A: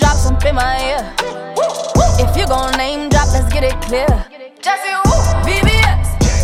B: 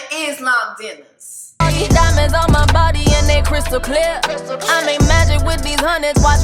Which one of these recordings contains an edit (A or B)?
B